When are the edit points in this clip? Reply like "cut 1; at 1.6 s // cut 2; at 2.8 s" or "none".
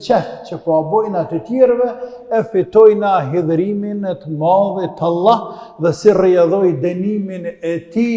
none